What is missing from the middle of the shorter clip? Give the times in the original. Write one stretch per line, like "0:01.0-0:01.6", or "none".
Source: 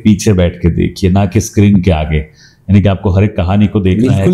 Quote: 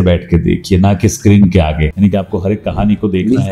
0:02.2-0:02.6